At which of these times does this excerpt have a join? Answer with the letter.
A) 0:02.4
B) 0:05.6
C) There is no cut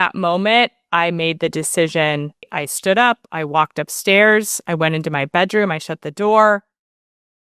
A